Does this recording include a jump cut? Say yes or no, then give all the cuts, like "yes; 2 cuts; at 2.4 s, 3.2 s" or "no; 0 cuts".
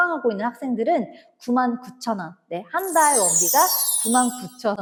no; 0 cuts